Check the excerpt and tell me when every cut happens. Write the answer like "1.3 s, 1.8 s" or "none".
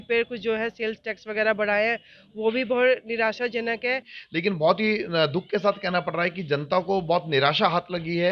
4.2 s